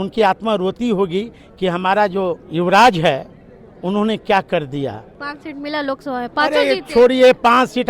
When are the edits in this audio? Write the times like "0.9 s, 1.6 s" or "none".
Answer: 2.4 s, 5.2 s